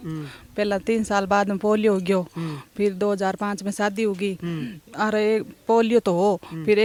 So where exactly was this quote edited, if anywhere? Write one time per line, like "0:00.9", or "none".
none